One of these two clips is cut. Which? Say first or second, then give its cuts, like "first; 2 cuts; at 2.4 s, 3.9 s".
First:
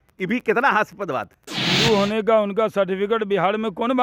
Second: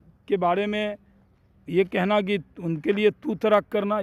first; 1 cut; at 1.7 s